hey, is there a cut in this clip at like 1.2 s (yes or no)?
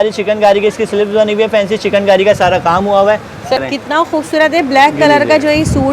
no